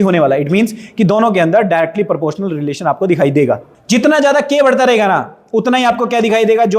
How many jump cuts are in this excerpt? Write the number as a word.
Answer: one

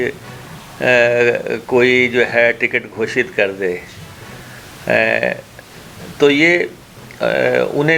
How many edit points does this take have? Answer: zero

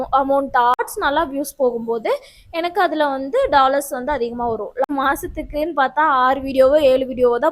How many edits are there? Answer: two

